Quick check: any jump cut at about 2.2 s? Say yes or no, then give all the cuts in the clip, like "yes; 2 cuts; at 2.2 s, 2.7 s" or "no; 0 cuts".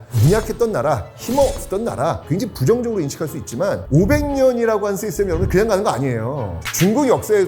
yes; 1 cut; at 2.2 s